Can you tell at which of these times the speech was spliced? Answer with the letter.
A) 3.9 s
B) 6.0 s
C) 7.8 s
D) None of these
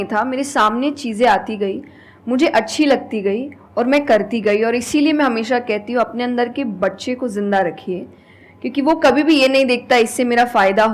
D